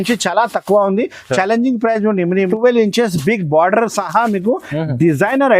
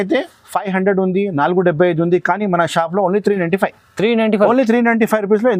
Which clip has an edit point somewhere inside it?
first; 1 cut; at 2.5 s

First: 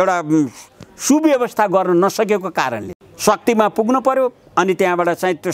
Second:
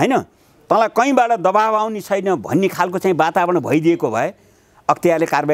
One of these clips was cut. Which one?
first; 1 cut; at 2.9 s

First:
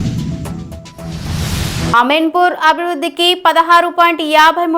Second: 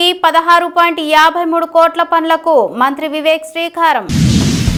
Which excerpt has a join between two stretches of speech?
first; 1 cut; at 1.9 s

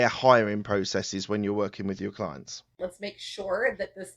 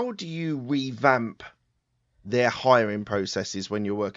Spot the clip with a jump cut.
first; 1 cut; at 2.8 s

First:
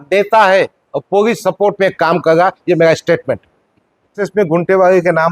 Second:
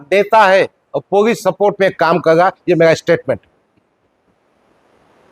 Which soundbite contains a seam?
first; 1 cut; at 4.2 s

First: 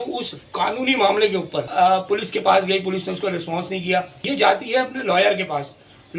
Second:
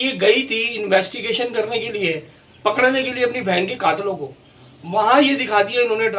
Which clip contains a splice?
first; 2 cuts; at 2.0 s, 4.2 s

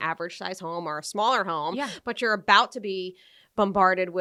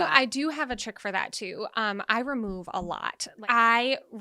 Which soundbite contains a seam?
second; 1 cut; at 3.3 s

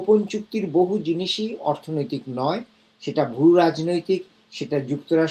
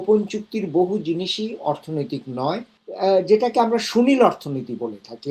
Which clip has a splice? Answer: second; 1 cut; at 2.8 s

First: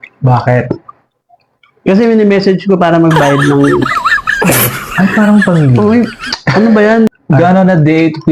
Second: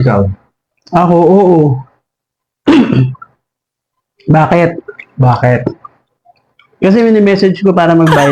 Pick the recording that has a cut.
first; 1 cut; at 7.1 s

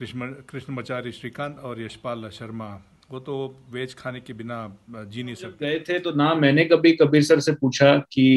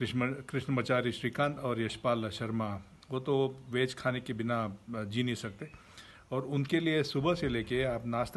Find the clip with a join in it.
first; 1 cut; at 5.6 s

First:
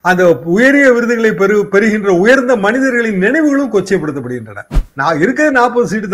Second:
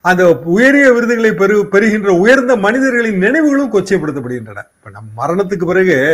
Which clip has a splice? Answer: first; 1 cut; at 4.8 s

